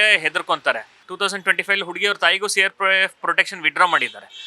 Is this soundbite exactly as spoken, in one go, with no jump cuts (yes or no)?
no